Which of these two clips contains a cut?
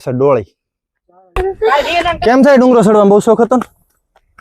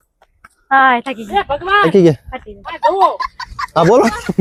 first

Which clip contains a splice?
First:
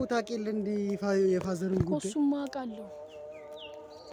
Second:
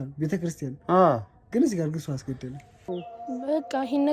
second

